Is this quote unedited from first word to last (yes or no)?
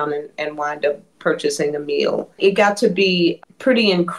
no